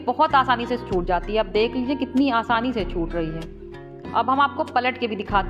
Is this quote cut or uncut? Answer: uncut